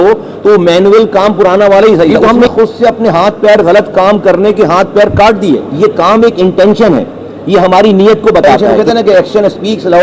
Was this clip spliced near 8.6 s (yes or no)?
yes